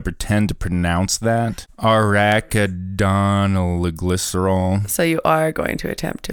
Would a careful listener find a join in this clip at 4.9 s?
no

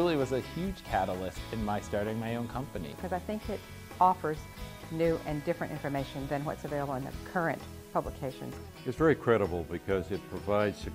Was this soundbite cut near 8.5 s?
yes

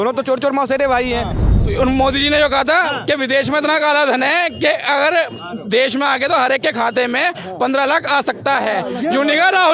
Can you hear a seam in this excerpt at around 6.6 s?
no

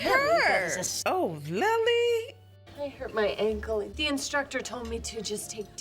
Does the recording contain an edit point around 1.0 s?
yes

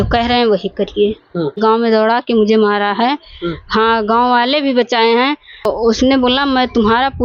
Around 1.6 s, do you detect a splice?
yes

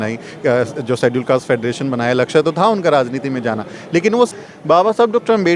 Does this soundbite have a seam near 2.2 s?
no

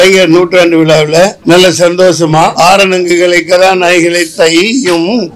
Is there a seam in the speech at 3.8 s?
no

